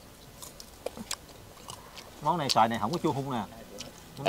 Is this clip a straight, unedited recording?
yes; 0 cuts

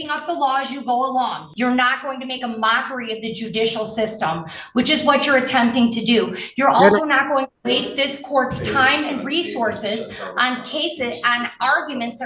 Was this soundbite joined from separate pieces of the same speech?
yes; 1 cut; at 1.4 s

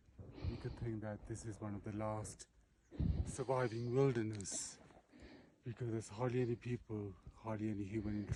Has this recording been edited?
no; 0 cuts

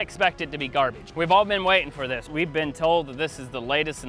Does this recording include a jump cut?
yes; 2 cuts; at 1.0 s, 2.3 s

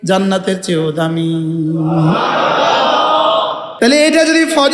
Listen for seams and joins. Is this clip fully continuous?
no; 1 cut; at 3.7 s

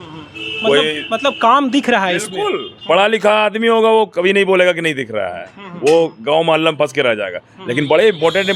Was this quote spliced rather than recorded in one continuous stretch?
no; 0 cuts

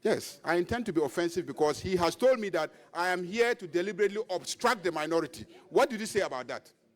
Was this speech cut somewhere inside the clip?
no; 0 cuts

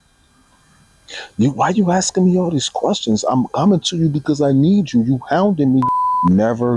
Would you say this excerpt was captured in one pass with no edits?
no; 1 cut; at 5.9 s

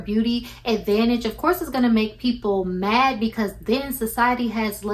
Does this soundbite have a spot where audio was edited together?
no; 0 cuts

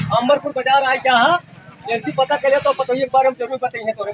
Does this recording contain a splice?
no; 0 cuts

